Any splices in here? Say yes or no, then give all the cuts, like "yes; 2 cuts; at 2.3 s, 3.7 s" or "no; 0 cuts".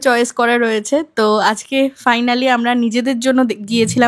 no; 0 cuts